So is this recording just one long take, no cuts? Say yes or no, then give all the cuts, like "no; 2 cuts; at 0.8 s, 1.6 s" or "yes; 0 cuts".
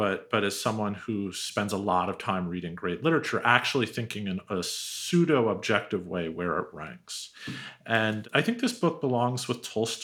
yes; 0 cuts